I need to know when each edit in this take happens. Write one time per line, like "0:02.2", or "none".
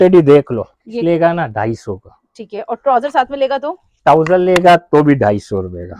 0:01.0